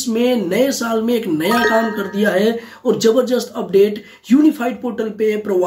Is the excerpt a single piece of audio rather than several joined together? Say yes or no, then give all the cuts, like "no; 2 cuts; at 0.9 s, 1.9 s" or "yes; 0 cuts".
yes; 0 cuts